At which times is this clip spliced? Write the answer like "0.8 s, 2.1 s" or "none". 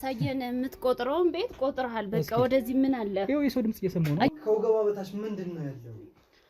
4.3 s